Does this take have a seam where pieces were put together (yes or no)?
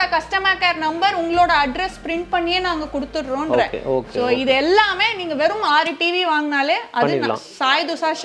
no